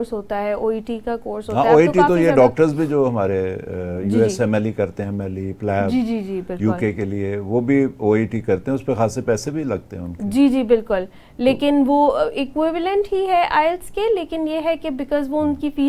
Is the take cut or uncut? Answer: uncut